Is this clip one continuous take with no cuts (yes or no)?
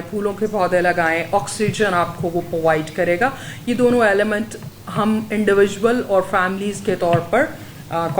yes